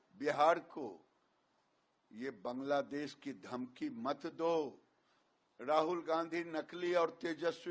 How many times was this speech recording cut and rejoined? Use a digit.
0